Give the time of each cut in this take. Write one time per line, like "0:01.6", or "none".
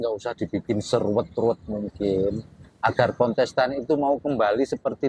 none